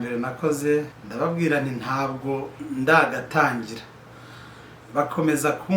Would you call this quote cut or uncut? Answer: cut